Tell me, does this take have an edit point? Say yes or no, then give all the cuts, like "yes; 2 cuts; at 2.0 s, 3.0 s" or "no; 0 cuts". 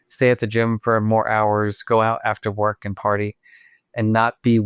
yes; 1 cut; at 1.8 s